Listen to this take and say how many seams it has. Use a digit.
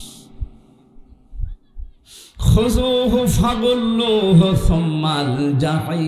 0